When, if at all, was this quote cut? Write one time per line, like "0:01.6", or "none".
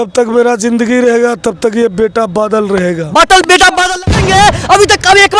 0:04.0